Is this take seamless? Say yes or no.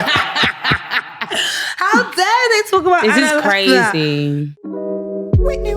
no